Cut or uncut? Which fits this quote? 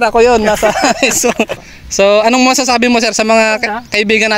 cut